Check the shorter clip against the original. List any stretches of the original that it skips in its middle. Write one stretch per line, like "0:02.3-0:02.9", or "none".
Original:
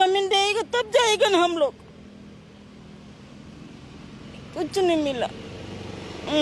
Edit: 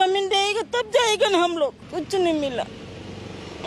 0:01.8-0:04.5